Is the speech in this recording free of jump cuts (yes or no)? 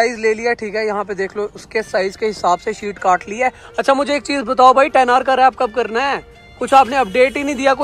yes